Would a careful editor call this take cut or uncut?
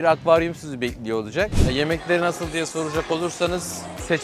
cut